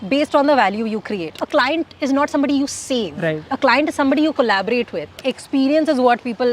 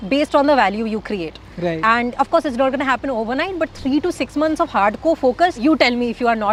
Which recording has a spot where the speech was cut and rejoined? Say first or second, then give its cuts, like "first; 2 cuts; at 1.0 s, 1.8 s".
first; 3 cuts; at 1.4 s, 3.5 s, 5.2 s